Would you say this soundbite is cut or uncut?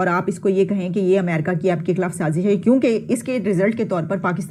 uncut